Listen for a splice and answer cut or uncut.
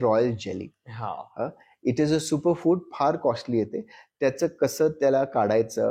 uncut